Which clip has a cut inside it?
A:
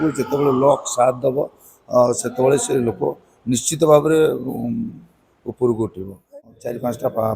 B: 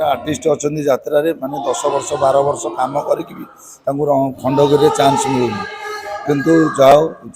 A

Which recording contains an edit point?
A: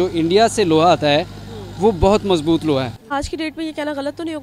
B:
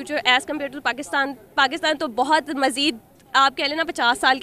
A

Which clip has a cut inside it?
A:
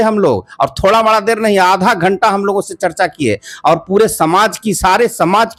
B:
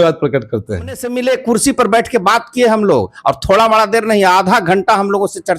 B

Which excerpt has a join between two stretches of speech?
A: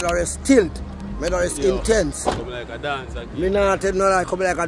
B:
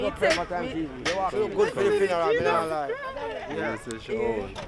B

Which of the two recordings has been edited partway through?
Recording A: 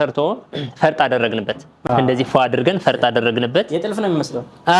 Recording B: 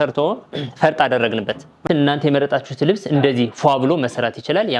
B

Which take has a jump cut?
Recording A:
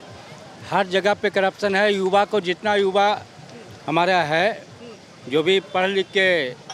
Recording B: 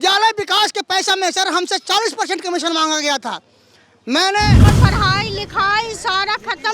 B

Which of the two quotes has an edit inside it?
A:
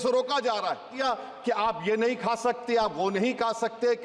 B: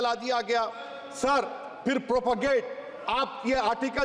A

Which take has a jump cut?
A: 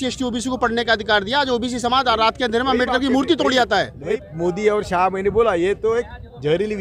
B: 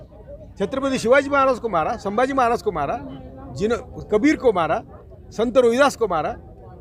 A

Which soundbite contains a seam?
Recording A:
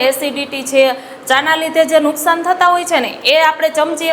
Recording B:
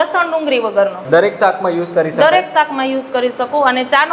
B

